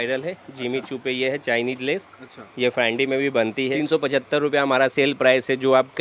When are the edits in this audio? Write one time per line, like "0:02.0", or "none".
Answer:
0:03.7